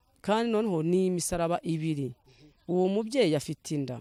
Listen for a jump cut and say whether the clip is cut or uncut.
uncut